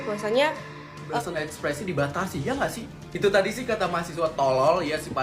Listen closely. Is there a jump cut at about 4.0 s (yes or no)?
no